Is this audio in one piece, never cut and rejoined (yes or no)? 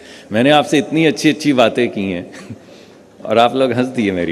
yes